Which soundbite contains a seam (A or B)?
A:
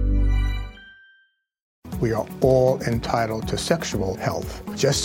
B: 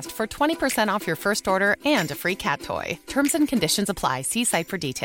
A